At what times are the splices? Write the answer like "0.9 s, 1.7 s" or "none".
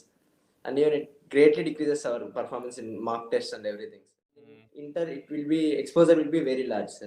4.7 s